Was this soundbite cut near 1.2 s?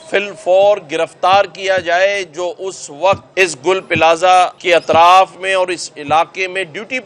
no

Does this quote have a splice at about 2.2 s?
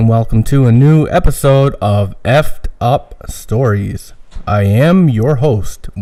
no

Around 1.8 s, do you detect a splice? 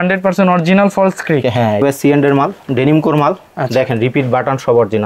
yes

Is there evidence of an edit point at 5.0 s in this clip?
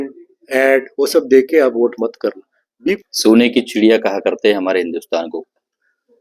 no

